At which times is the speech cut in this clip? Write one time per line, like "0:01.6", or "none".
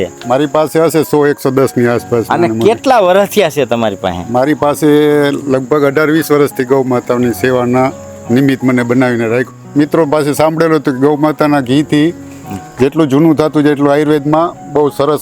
0:09.5